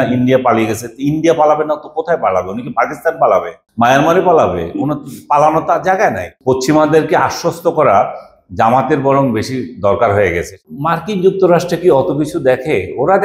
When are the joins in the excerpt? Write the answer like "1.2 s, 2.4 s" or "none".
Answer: 3.6 s, 6.3 s, 10.6 s